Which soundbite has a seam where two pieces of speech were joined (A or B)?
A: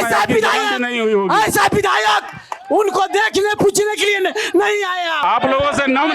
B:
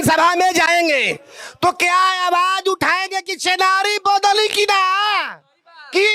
A